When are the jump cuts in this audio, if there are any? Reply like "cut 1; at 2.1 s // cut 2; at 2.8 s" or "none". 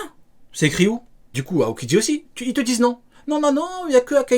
cut 1; at 1.4 s

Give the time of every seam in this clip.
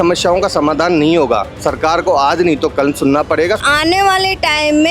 cut 1; at 3.6 s

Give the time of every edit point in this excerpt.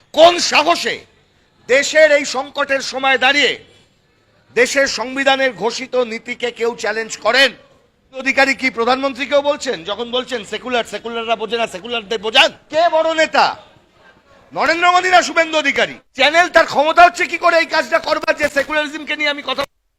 cut 1; at 8.3 s // cut 2; at 12.6 s // cut 3; at 16.0 s

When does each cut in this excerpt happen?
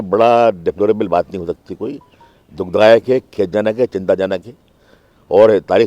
none

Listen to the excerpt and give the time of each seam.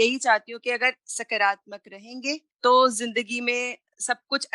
cut 1; at 2.5 s

